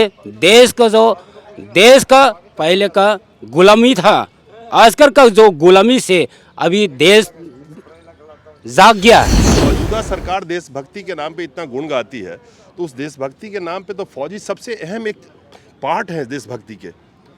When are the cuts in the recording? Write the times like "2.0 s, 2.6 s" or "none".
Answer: 9.5 s